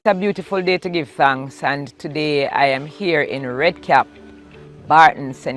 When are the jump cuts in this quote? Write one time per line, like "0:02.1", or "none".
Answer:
none